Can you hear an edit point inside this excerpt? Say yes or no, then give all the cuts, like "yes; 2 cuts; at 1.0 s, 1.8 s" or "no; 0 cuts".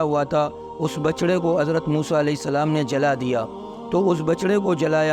no; 0 cuts